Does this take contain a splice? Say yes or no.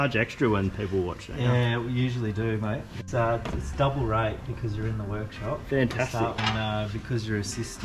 yes